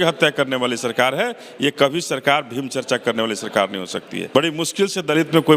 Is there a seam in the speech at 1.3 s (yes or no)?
no